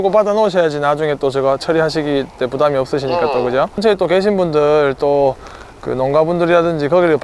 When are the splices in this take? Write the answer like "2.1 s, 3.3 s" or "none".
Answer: 3.8 s